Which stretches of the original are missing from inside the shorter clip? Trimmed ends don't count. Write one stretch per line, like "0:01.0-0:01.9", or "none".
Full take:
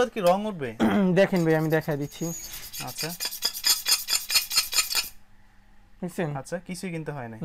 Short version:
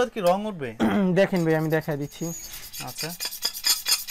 none